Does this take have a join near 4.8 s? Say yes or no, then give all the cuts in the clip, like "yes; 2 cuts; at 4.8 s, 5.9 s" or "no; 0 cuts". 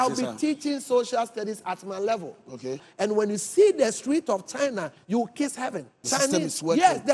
no; 2 cuts; at 2.8 s, 6.0 s